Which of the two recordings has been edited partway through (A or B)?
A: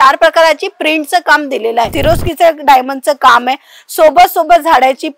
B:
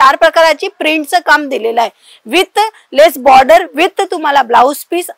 A